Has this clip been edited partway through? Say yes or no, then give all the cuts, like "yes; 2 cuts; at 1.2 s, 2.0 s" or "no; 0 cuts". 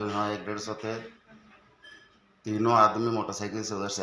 no; 0 cuts